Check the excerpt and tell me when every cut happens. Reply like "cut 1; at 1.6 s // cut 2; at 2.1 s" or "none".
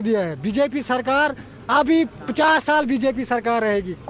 none